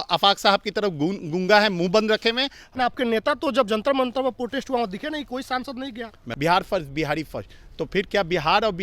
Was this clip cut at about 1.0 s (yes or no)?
no